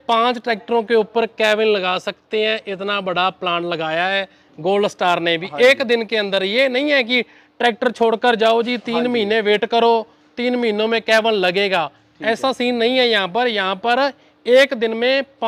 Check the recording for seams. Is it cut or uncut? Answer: uncut